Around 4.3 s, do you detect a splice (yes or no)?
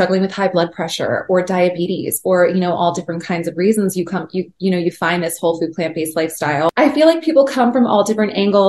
no